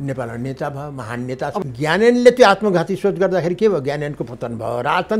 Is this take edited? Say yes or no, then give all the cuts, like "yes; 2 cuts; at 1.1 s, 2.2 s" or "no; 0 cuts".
yes; 1 cut; at 1.6 s